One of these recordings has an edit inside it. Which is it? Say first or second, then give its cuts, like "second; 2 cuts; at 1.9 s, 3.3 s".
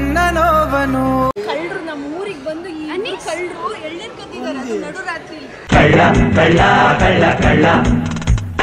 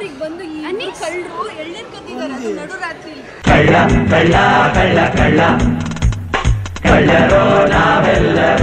first; 1 cut; at 1.3 s